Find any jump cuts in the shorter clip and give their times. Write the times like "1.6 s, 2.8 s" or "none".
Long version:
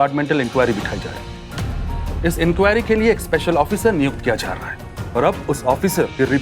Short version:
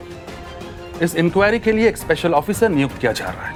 none